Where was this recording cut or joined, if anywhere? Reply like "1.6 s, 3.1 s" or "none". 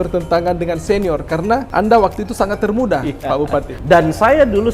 1.7 s, 3.7 s

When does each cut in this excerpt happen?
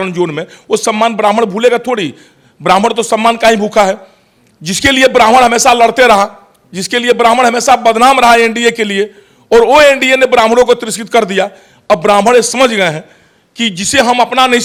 none

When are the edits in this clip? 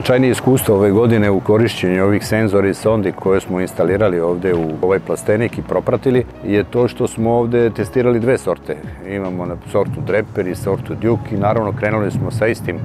3.2 s, 4.8 s, 6.4 s

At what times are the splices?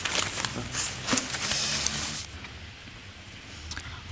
none

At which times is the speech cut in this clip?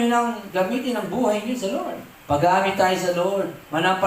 2.1 s

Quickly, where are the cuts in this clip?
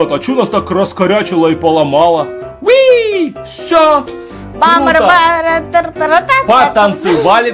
none

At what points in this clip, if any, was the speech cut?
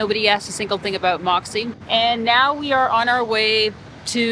1.8 s

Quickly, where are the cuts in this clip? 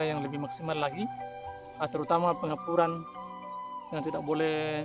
none

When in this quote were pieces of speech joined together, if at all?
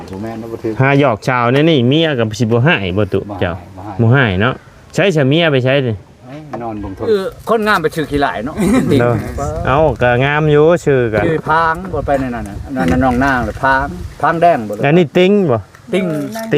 7.1 s

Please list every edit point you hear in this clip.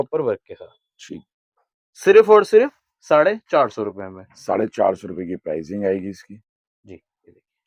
none

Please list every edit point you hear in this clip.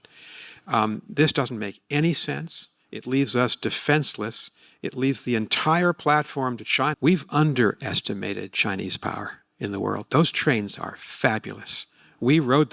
6.9 s

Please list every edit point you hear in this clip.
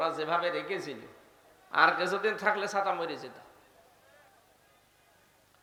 none

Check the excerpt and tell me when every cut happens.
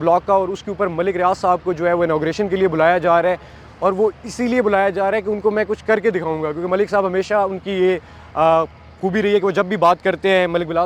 none

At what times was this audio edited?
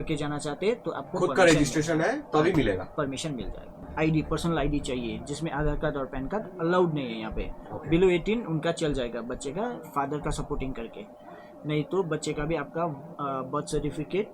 3.9 s

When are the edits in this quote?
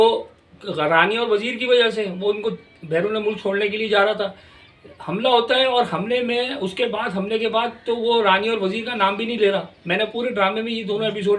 none

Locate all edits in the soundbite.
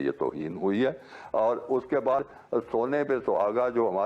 2.3 s

